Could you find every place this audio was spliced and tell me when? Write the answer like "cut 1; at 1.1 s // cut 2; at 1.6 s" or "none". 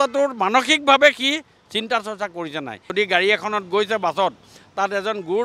cut 1; at 2.9 s